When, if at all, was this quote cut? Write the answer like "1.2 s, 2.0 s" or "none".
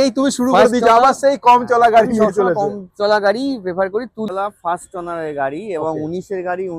4.3 s